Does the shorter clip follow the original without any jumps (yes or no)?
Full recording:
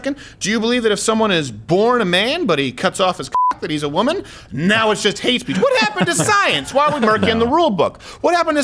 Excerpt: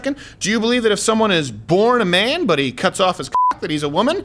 yes